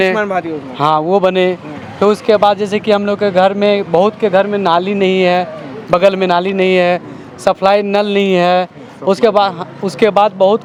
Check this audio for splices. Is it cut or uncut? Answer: uncut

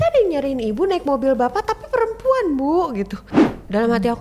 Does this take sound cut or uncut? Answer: cut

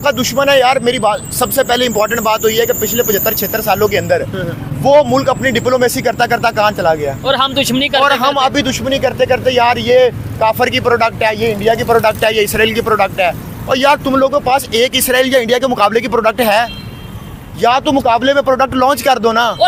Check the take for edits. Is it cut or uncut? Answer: uncut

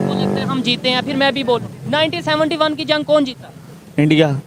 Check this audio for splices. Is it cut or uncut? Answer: uncut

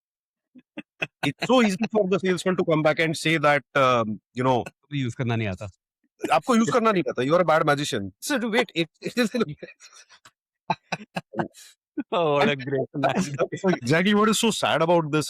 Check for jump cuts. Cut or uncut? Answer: cut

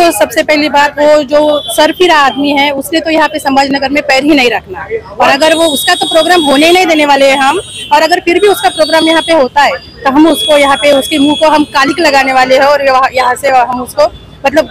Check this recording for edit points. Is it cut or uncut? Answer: uncut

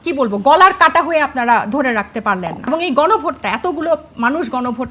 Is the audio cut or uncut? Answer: cut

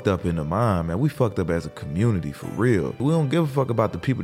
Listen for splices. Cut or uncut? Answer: cut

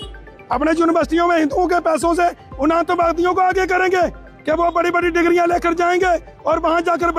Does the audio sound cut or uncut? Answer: uncut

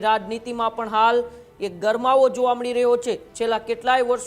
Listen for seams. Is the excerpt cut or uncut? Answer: cut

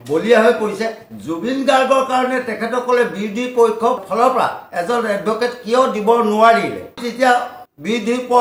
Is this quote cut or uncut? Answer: uncut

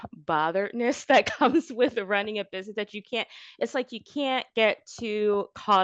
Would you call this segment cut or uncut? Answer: uncut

